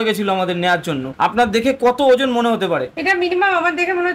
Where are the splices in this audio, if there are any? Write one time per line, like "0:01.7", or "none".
0:01.0